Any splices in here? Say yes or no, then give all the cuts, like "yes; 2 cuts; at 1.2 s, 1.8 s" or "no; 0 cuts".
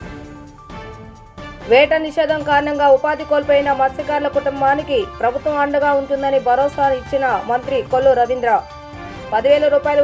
no; 0 cuts